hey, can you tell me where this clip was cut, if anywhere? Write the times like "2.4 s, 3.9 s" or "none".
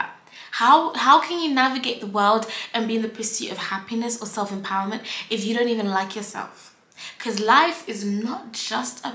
none